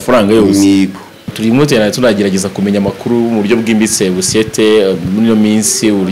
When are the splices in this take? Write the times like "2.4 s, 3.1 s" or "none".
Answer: 1.2 s